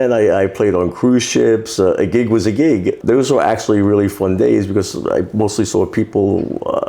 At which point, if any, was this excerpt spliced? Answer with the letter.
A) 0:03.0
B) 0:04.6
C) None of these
A